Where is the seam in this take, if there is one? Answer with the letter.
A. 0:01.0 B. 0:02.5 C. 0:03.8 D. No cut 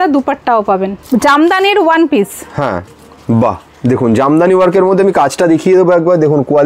A